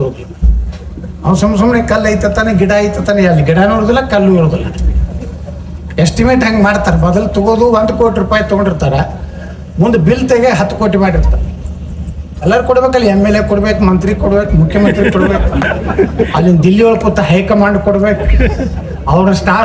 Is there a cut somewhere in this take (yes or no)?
no